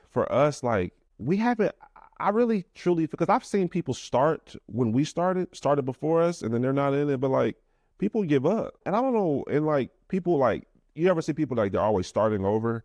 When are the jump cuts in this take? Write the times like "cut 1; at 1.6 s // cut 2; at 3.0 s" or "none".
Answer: cut 1; at 1.1 s // cut 2; at 8.8 s